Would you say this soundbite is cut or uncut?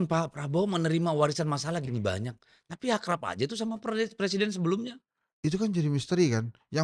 uncut